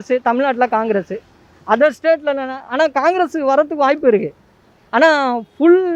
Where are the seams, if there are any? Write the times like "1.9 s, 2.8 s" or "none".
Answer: none